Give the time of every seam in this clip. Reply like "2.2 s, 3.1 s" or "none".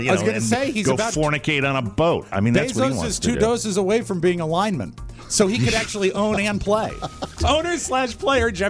7.4 s